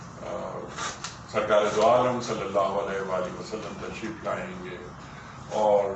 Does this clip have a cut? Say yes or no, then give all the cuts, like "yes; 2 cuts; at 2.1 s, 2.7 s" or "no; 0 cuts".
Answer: no; 0 cuts